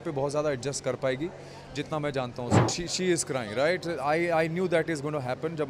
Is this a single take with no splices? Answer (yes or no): no